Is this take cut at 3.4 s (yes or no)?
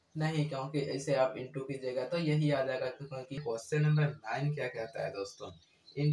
yes